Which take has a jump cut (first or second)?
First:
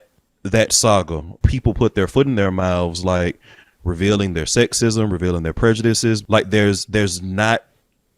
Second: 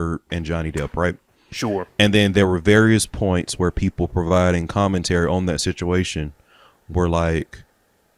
first